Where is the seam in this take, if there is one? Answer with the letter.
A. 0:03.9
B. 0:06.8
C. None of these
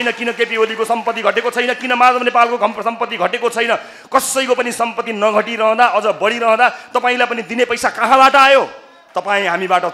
C